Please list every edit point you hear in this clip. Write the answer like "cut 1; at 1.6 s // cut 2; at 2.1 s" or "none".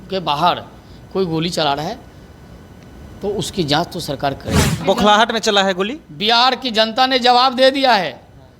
cut 1; at 4.8 s

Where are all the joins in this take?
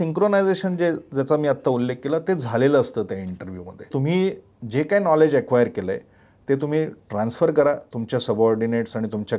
cut 1; at 3.9 s

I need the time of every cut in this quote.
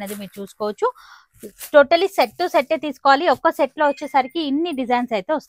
none

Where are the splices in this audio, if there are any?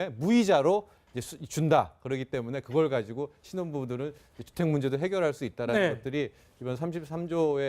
cut 1; at 4.6 s

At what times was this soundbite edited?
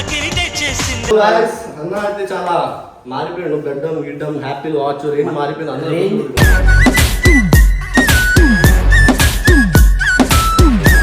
cut 1; at 1.1 s

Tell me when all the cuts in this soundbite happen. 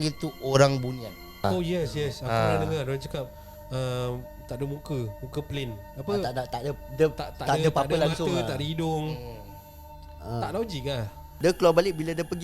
cut 1; at 1.4 s // cut 2; at 11.2 s

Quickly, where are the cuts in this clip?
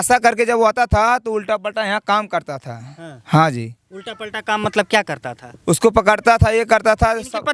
none

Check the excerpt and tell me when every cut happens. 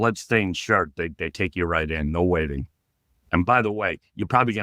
cut 1; at 3.2 s

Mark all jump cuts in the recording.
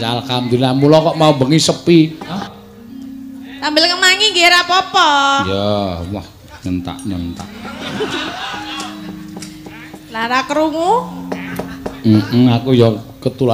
cut 1; at 2.5 s

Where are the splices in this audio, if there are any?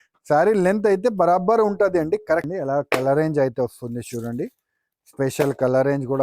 cut 1; at 2.5 s

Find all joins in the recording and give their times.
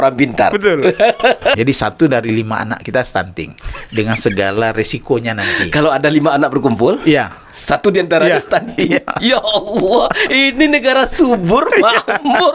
cut 1; at 1.6 s

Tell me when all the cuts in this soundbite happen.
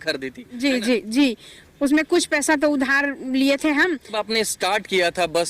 cut 1; at 4.2 s

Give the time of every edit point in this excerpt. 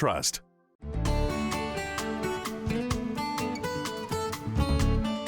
cut 1; at 0.9 s

